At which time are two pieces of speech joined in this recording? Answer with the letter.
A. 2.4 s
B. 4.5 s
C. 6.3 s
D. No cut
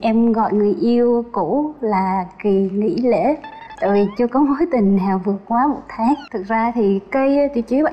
C